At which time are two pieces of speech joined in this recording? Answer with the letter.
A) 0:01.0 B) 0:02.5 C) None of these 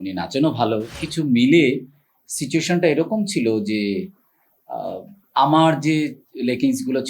A